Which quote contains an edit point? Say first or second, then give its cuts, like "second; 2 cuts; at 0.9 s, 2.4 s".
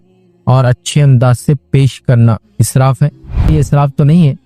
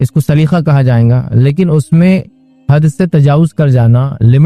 first; 1 cut; at 3.5 s